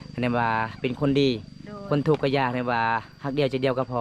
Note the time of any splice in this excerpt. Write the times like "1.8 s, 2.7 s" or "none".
none